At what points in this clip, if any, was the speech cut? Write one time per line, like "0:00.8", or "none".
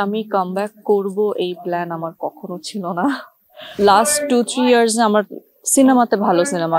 0:03.7